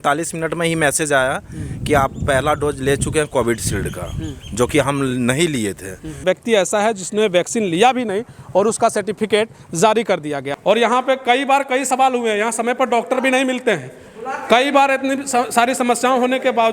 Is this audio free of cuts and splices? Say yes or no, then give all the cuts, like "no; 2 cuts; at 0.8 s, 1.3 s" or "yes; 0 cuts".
no; 2 cuts; at 6.2 s, 10.4 s